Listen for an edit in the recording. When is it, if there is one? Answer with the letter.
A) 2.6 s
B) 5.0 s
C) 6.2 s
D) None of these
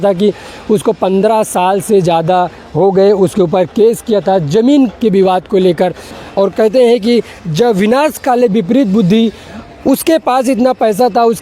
C